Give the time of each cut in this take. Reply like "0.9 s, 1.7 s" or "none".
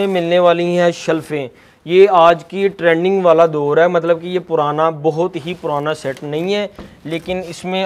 none